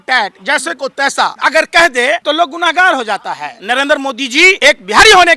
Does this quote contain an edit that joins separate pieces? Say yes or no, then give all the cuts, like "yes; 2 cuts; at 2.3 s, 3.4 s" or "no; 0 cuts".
yes; 4 cuts; at 1.4 s, 2.2 s, 3.5 s, 4.6 s